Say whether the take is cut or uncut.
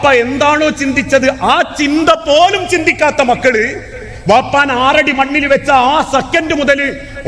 uncut